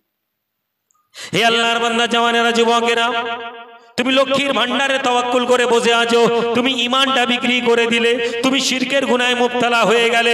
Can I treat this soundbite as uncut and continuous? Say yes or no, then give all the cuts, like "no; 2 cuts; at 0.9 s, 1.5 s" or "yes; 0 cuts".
yes; 0 cuts